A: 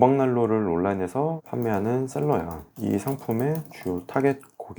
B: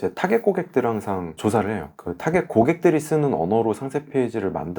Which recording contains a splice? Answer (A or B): B